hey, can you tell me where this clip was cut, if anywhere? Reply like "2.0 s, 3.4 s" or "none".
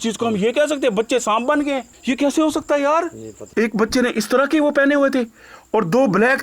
1.9 s, 3.3 s